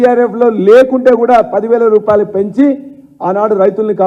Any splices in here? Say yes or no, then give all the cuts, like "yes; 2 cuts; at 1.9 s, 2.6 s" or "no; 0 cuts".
no; 0 cuts